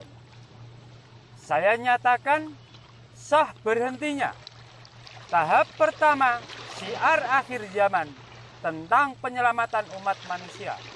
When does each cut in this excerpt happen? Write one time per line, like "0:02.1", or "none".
none